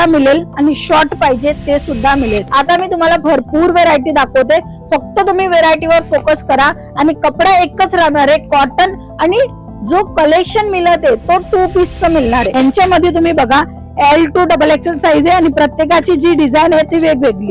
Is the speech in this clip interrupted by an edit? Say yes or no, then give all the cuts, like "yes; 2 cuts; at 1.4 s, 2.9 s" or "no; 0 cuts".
yes; 2 cuts; at 2.4 s, 12.5 s